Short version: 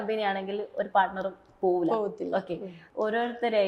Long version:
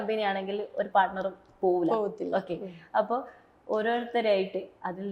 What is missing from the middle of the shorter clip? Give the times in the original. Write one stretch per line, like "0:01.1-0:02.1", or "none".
0:02.7-0:03.4

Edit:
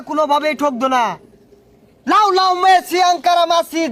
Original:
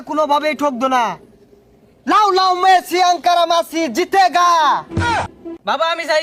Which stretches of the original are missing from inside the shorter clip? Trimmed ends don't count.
none

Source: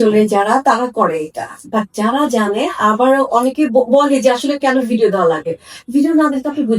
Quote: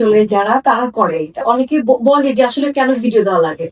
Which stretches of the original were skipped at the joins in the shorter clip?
0:01.4-0:03.3

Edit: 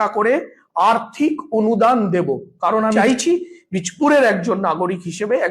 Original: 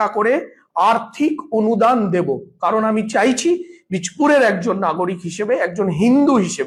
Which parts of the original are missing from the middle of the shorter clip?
0:03.0-0:03.2

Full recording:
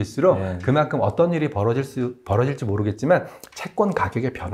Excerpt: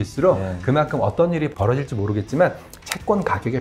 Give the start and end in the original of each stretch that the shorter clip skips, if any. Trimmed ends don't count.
0:01.5-0:02.2

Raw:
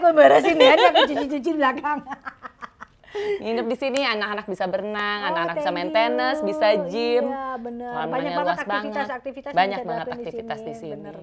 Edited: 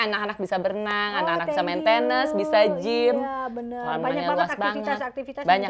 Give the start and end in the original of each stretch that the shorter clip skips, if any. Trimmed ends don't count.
none

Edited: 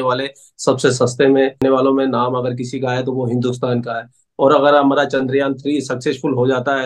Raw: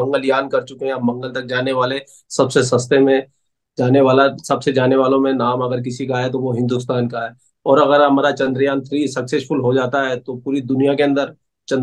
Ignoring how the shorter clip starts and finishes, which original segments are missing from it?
0:03.3-0:04.9

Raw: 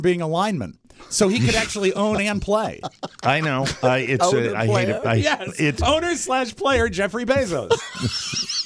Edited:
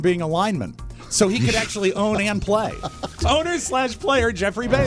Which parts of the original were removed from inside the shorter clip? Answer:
0:03.2-0:05.7

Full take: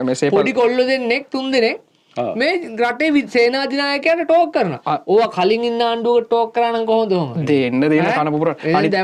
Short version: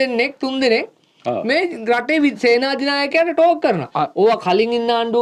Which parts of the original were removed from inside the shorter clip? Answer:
none

